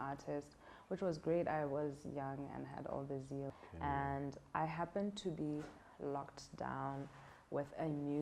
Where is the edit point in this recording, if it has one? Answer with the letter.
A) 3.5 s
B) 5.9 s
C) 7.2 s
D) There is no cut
A